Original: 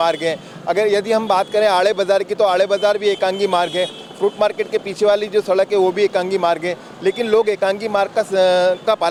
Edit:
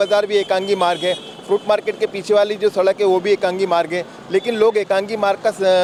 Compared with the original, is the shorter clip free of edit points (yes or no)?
yes